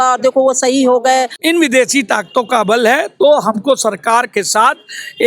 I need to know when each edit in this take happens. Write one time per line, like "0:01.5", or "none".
0:01.3

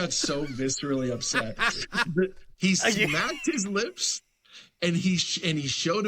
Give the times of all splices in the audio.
0:02.4

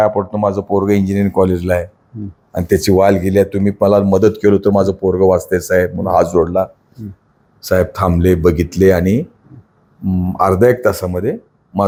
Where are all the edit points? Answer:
none

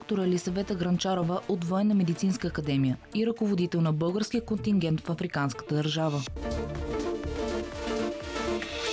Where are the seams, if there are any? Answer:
0:06.3

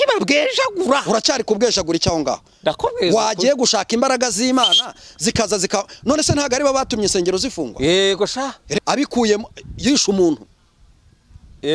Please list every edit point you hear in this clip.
0:08.6

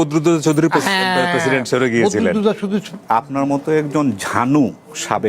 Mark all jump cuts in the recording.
0:03.0

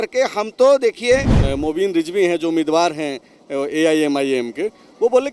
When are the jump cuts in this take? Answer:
0:01.4

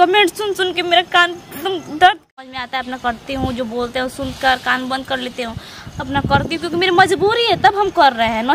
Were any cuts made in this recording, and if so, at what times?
0:02.3

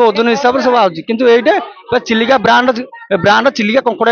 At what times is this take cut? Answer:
none

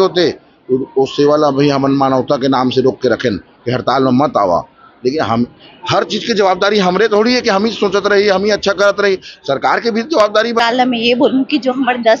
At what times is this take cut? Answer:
0:10.6

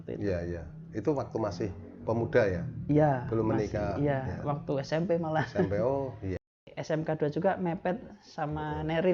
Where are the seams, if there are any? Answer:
0:06.6

